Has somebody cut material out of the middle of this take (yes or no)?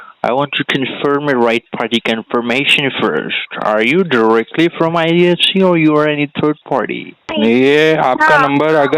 yes